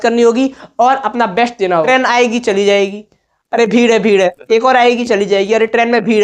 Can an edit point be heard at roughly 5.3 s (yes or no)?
no